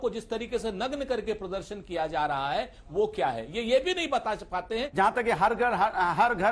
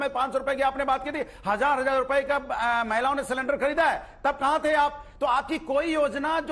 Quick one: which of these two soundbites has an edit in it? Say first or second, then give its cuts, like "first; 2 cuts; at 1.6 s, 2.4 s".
first; 1 cut; at 4.9 s